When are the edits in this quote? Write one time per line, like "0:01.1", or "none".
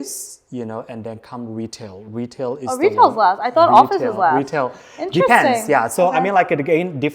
none

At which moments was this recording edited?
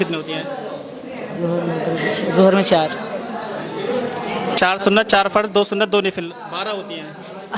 none

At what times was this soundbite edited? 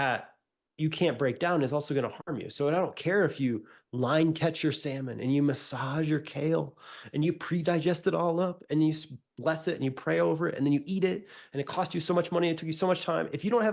none

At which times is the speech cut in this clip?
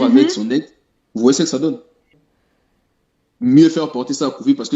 0:02.1

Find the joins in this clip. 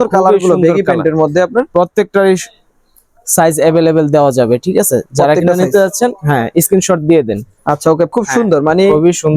0:08.1

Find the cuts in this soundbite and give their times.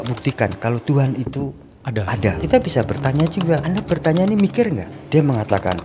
0:02.4
0:03.6
0:04.9

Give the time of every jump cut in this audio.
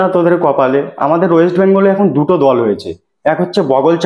0:00.9

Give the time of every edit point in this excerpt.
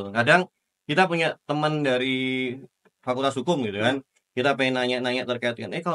none

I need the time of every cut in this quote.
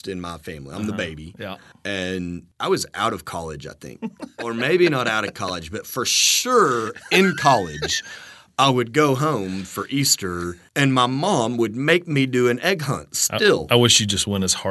0:01.7
0:02.5
0:04.3
0:10.6

